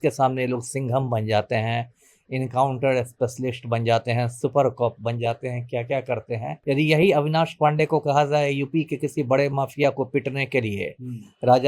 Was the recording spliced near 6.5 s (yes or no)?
yes